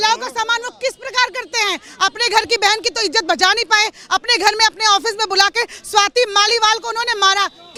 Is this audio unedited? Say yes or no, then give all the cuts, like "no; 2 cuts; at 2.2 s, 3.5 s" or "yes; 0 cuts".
yes; 0 cuts